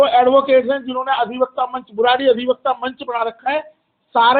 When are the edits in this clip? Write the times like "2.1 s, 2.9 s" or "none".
none